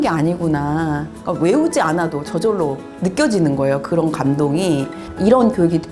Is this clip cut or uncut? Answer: cut